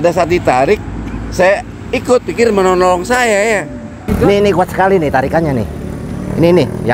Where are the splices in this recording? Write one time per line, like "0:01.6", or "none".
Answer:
0:04.1